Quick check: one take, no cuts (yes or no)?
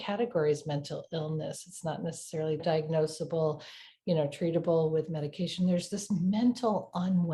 no